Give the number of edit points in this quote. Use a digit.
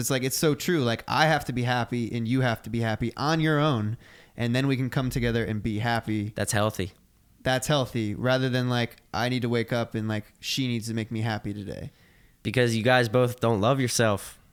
0